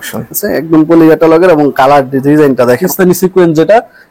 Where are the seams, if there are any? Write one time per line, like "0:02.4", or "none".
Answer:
0:02.8